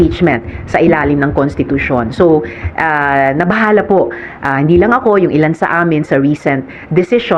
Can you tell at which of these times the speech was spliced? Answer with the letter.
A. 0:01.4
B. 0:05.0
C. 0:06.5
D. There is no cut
D